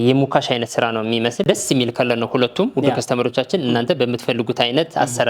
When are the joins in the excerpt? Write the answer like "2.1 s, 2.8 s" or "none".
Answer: 1.4 s

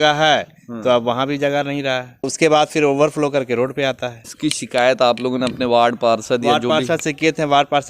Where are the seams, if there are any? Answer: 2.3 s, 4.3 s

